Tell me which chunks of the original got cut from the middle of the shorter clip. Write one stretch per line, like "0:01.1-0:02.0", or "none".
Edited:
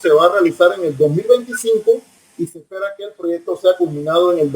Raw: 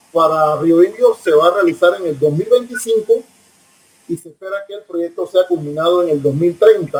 0:03.4-0:03.9